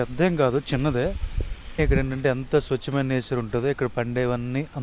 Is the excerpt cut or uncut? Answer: cut